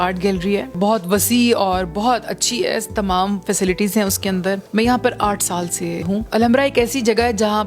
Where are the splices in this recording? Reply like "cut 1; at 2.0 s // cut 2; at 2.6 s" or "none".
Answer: cut 1; at 0.7 s // cut 2; at 4.6 s // cut 3; at 6.2 s